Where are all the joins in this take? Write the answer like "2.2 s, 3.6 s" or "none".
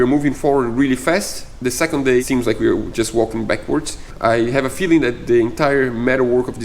2.2 s, 4.0 s